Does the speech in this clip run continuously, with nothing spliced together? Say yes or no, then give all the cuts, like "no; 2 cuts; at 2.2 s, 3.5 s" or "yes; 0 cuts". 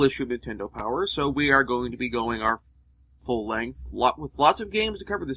no; 1 cut; at 2.1 s